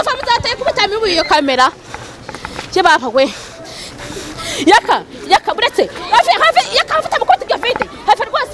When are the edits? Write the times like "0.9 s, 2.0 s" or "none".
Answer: none